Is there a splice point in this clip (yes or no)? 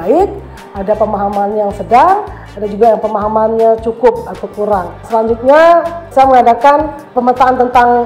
yes